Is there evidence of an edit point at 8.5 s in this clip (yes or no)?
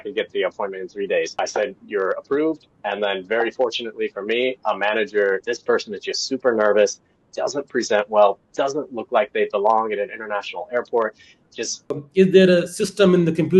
no